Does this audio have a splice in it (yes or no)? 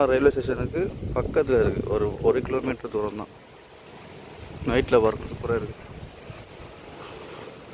no